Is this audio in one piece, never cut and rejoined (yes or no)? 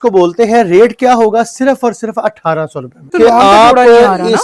no